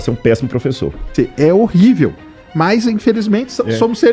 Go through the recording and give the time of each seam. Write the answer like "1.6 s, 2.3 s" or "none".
1.1 s